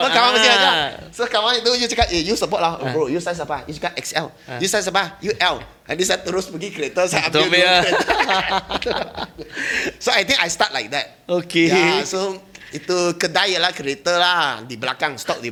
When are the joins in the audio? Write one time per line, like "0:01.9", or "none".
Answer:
none